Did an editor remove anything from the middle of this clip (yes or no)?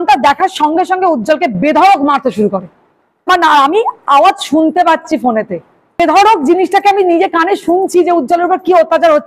yes